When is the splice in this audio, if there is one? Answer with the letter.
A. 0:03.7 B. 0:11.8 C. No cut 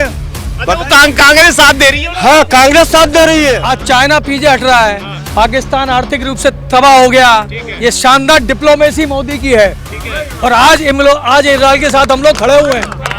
A